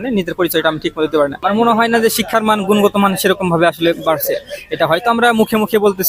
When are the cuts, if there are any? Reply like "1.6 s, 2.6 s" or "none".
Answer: none